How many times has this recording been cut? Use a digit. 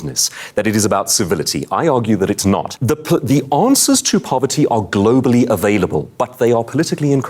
1